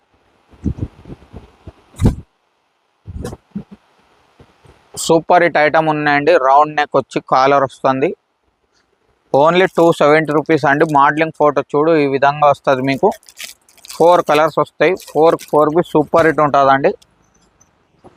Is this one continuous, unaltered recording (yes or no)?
yes